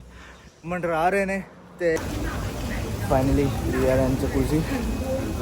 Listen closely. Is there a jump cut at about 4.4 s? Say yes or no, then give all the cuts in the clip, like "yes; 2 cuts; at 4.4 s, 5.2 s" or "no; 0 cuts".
no; 1 cut; at 2.0 s